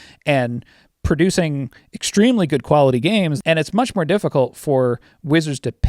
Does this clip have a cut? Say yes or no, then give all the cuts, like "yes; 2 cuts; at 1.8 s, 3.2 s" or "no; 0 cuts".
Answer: yes; 1 cut; at 3.3 s